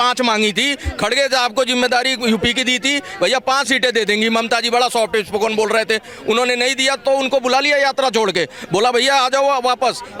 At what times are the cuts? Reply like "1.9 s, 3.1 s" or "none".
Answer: none